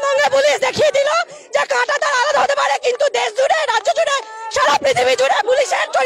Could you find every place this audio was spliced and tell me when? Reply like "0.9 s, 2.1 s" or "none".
none